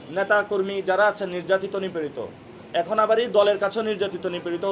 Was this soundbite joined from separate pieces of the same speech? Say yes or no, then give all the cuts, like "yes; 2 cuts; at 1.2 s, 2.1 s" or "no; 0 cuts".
no; 0 cuts